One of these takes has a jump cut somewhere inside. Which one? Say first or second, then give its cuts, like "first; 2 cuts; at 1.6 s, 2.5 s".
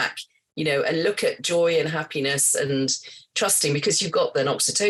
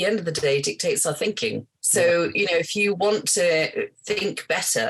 second; 1 cut; at 1.7 s